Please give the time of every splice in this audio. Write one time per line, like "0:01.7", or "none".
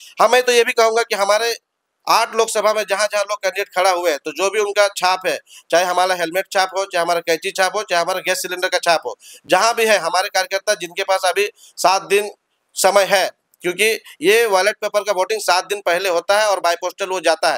none

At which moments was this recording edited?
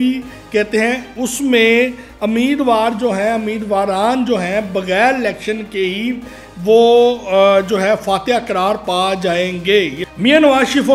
0:10.0

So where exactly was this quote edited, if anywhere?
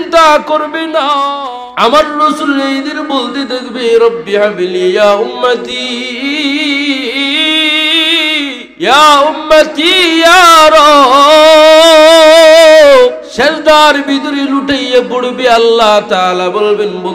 0:01.3
0:08.6
0:13.2

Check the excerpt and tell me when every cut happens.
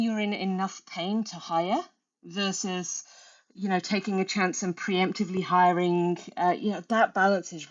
none

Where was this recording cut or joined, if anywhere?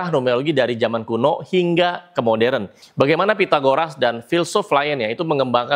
0:02.8

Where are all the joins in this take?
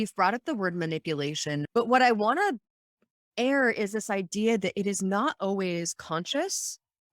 0:01.7

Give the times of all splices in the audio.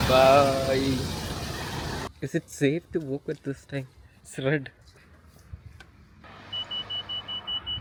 none

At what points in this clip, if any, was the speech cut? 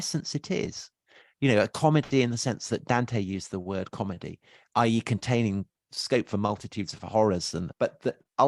0:05.9
0:07.7

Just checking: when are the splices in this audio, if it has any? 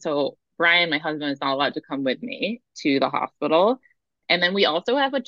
none

